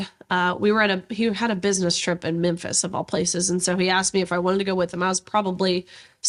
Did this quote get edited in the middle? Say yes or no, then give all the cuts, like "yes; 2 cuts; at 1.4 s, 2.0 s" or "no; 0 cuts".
no; 0 cuts